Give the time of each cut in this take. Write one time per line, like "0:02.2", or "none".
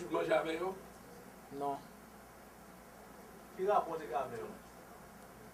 none